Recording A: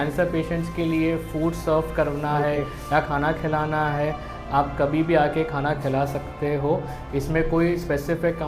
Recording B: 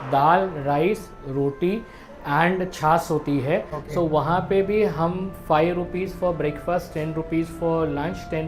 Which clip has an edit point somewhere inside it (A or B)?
B